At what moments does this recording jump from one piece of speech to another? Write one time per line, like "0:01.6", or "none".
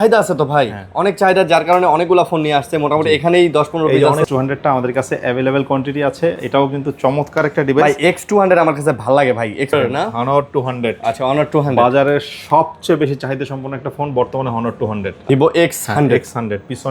0:04.2
0:09.7
0:15.2